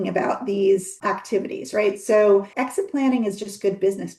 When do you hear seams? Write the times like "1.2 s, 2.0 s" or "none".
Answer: 0.9 s, 2.5 s